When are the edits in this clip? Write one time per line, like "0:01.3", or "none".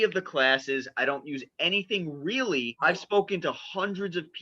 0:02.7